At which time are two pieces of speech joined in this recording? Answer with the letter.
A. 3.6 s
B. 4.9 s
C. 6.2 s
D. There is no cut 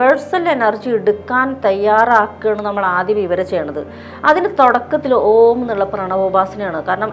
D